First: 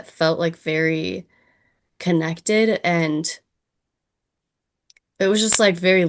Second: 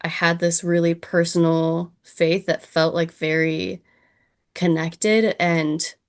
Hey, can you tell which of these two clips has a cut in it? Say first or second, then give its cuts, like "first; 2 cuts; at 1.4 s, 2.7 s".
first; 1 cut; at 5.0 s